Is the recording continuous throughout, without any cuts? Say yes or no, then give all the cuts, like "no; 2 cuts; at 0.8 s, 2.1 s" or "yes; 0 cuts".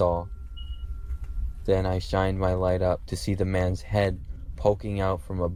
yes; 0 cuts